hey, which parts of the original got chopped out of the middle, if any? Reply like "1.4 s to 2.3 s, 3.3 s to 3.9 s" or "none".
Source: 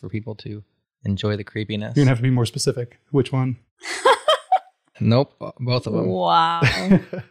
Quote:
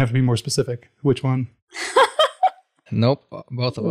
none